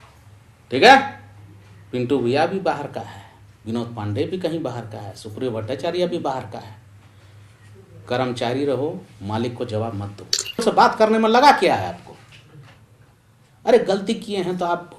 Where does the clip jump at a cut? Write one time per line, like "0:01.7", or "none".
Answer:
0:10.6